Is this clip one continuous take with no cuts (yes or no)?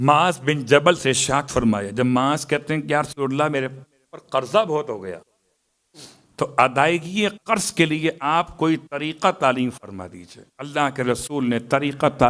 yes